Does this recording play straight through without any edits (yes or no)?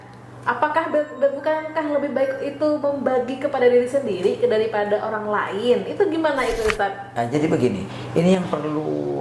yes